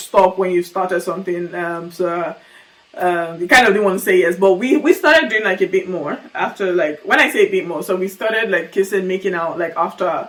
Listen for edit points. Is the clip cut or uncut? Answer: uncut